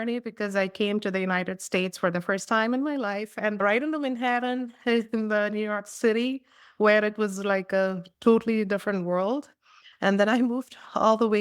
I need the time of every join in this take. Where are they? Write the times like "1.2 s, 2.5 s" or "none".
3.5 s, 9.8 s

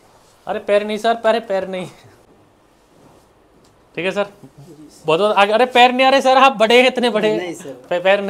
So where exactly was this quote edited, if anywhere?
2.3 s

